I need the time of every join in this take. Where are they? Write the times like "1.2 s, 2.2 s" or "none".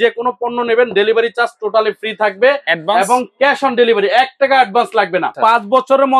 5.3 s

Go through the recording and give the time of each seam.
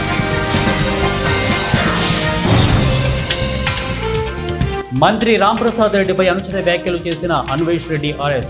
4.8 s

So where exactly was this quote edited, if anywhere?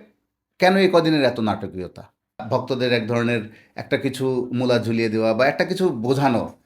2.4 s

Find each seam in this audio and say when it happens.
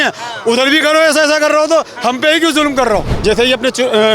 3.1 s

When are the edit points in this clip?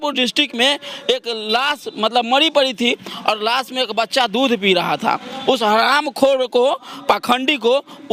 none

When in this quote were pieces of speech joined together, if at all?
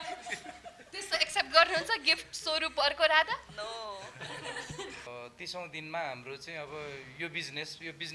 5.1 s

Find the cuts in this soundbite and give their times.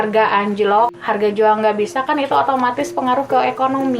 1.0 s

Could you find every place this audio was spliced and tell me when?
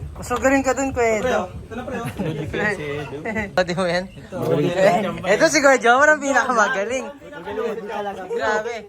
3.6 s

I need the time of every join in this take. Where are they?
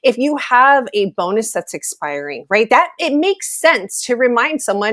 none

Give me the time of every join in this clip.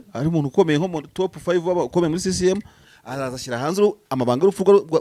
2.9 s

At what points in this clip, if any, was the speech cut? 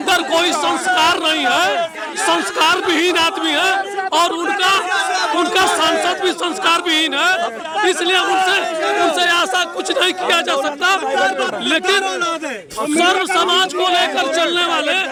none

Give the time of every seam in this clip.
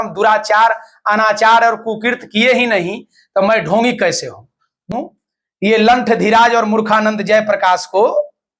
4.9 s

